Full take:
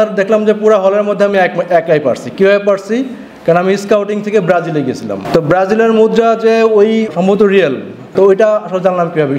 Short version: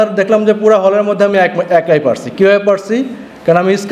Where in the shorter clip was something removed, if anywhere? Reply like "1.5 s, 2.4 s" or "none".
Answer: none

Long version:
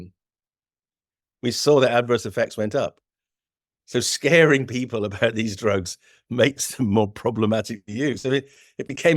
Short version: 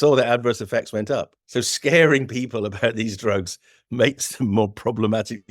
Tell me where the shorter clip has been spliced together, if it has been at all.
1.4 s

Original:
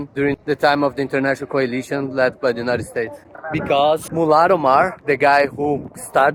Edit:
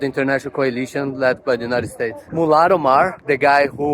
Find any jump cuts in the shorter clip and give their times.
2.3 s

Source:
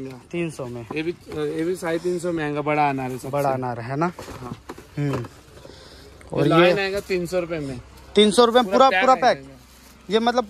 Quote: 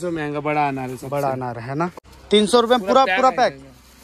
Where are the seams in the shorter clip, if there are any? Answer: 2.1 s

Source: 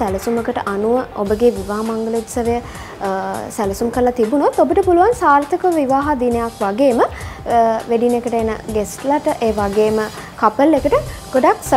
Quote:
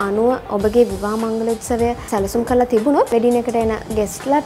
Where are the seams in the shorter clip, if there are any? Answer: 2.0 s, 3.1 s

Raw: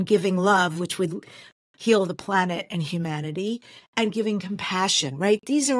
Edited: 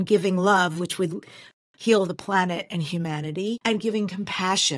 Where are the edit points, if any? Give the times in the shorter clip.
3.6 s

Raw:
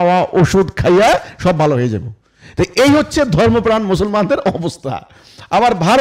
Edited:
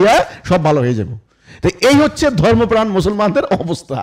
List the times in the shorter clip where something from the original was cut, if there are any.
none

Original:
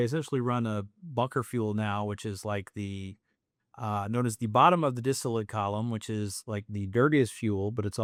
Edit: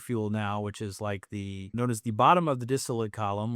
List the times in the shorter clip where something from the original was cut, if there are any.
1.7 s

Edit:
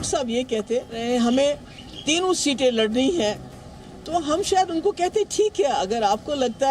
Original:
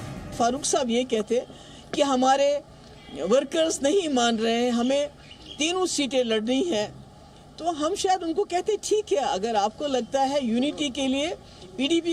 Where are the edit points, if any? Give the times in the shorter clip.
1.0 s

